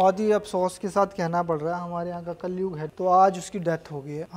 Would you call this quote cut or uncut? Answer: cut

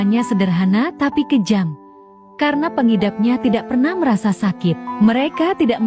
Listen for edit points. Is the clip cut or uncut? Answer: uncut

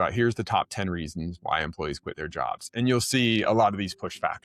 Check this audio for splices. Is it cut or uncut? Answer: uncut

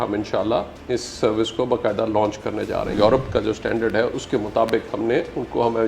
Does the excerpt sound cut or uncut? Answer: cut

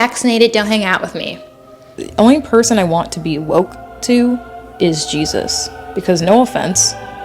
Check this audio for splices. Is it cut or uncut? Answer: cut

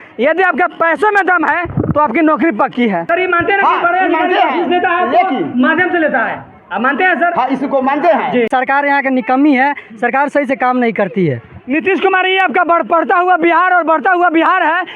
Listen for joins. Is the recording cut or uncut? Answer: cut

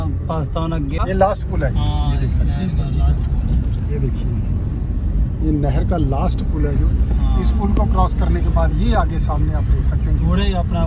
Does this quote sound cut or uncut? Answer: cut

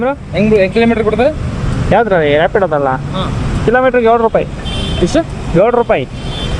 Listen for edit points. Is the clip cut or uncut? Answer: uncut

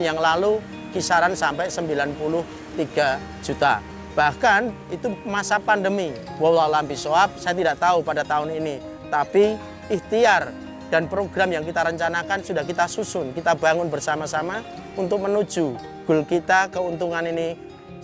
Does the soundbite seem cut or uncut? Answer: uncut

